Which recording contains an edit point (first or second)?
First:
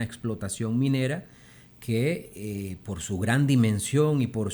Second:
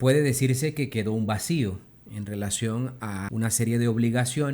second